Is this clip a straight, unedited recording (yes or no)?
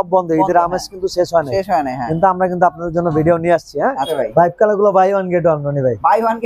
no